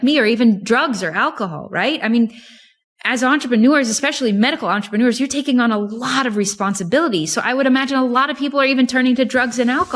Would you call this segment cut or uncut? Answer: uncut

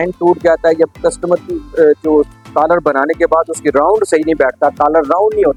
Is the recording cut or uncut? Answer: uncut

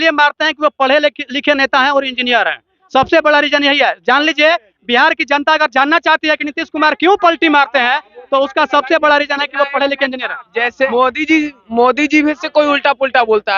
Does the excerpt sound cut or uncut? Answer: cut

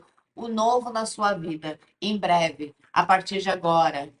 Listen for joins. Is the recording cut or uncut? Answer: uncut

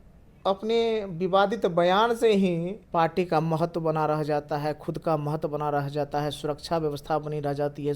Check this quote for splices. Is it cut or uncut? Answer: cut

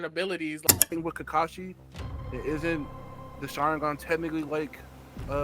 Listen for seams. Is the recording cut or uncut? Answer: cut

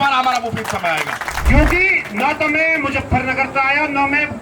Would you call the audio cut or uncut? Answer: cut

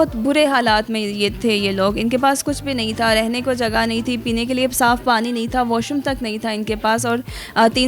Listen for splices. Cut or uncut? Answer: uncut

